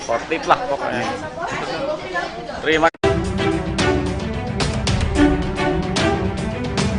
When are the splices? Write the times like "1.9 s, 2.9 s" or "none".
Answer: 2.9 s